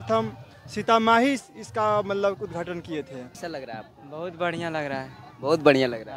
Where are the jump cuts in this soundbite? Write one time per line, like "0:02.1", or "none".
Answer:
0:03.5